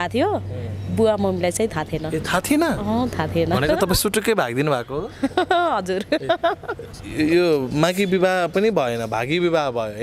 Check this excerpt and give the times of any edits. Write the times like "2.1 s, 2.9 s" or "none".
none